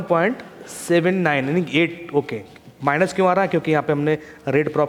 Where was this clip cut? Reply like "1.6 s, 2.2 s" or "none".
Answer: none